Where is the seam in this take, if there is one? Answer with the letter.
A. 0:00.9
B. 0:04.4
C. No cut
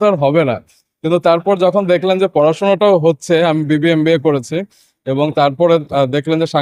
C